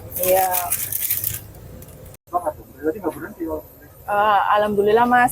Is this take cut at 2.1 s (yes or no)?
yes